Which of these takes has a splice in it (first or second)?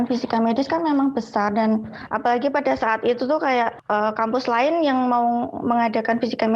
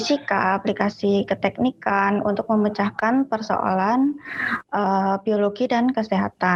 first